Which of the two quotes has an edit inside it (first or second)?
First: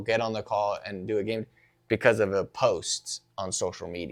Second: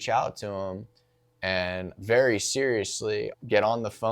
second